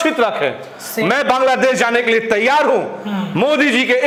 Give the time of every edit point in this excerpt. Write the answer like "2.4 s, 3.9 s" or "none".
none